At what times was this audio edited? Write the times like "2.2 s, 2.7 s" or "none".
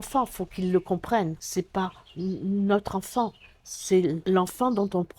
1.4 s, 4.2 s